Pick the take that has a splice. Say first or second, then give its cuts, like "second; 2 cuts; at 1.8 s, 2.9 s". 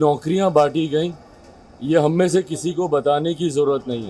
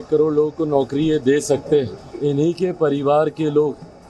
second; 1 cut; at 2.1 s